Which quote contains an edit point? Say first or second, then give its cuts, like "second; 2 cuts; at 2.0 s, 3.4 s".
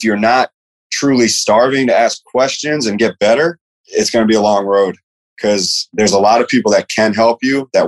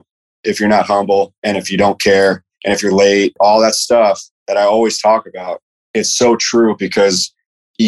second; 2 cuts; at 3.4 s, 4.3 s